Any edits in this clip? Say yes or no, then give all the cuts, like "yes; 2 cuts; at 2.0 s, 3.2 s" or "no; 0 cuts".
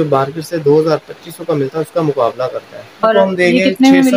yes; 1 cut; at 3.0 s